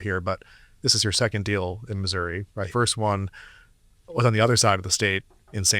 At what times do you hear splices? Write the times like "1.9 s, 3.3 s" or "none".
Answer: 2.7 s